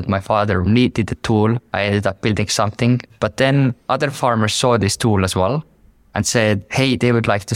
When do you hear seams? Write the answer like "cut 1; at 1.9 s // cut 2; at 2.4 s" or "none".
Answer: cut 1; at 3.0 s